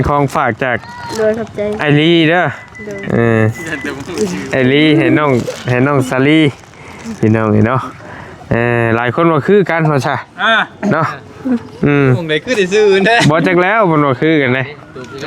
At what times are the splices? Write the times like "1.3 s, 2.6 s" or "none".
none